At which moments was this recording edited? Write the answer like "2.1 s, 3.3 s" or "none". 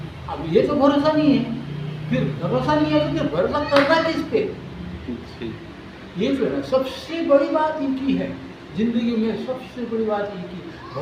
none